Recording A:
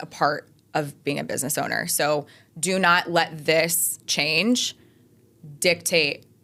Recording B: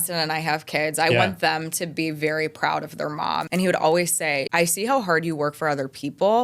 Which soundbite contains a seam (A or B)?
B